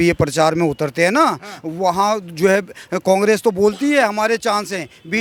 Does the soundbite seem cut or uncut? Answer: uncut